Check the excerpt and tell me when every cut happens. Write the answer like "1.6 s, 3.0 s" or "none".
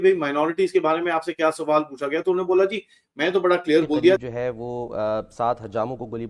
4.2 s